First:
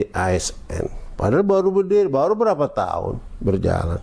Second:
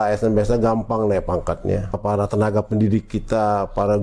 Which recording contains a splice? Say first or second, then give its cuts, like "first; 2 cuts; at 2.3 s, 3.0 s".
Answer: second; 1 cut; at 2.0 s